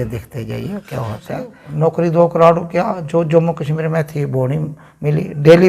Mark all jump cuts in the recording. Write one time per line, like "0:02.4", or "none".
0:01.6